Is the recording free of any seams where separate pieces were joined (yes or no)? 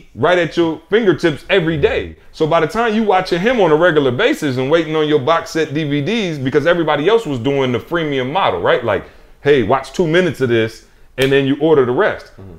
yes